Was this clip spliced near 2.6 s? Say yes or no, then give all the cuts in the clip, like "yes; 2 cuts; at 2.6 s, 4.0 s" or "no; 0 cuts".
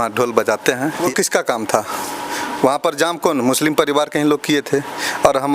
no; 1 cut; at 1.1 s